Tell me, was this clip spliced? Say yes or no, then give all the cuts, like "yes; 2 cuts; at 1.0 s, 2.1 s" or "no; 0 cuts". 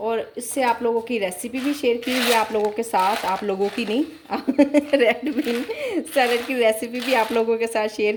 no; 0 cuts